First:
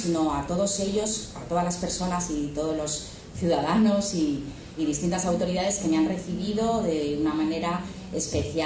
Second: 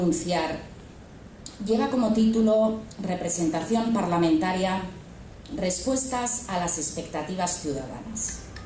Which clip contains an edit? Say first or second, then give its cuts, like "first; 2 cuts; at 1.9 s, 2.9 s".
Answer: first; 1 cut; at 4.4 s